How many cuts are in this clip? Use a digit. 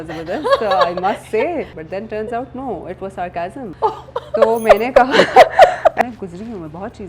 3